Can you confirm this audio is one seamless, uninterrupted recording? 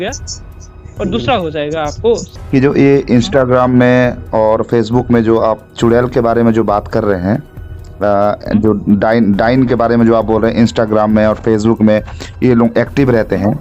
no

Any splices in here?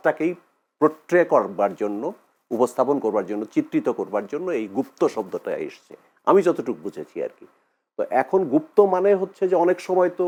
no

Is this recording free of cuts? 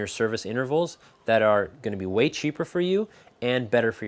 yes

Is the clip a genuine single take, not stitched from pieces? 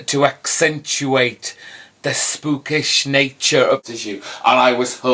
no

